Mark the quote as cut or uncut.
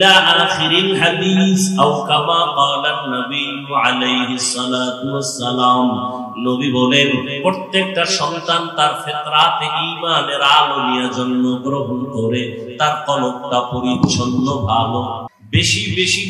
cut